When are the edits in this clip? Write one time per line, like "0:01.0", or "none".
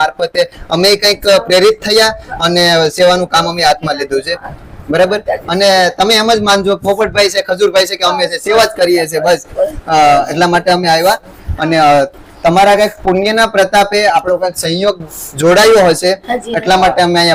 none